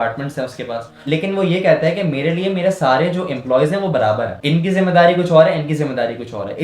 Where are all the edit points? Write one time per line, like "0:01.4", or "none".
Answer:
0:01.1